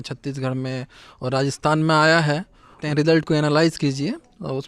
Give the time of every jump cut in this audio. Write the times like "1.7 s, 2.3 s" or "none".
2.8 s